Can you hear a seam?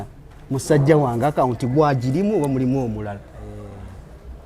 no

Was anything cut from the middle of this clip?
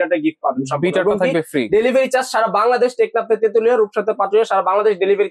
no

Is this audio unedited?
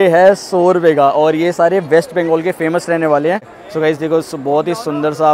no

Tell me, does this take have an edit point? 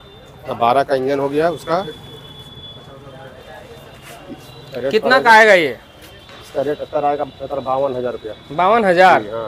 no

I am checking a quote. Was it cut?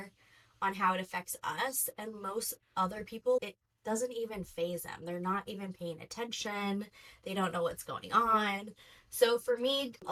no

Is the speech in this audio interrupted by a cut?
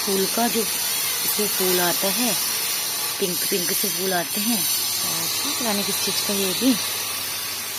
no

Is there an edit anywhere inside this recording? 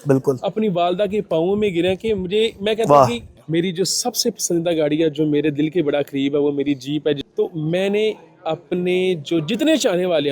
yes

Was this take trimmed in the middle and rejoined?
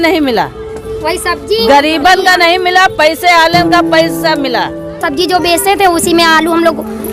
yes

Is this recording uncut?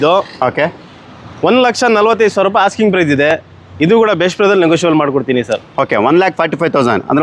yes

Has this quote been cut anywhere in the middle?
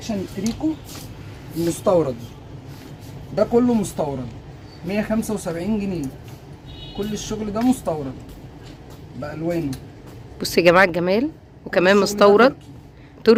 no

